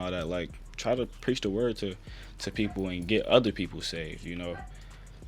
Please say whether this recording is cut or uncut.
uncut